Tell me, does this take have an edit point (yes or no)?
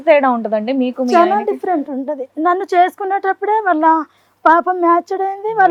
no